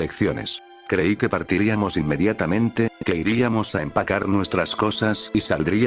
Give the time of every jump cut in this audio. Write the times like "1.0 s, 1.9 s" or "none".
0.9 s